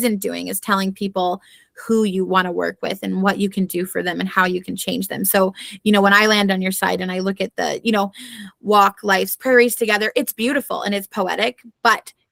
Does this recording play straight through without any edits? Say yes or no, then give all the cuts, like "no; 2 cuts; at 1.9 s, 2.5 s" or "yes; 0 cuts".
yes; 0 cuts